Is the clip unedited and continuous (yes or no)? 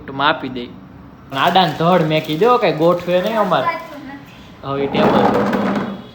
no